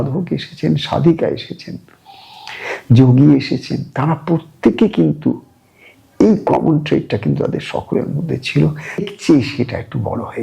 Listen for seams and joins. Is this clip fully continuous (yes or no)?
no